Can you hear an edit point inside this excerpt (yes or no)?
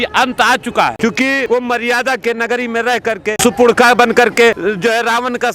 yes